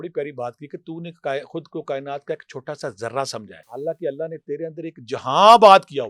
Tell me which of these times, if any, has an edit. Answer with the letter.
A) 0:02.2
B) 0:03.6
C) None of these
B